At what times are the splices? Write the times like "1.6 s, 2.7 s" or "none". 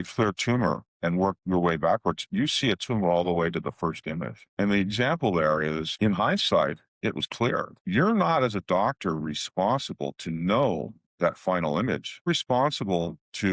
12.3 s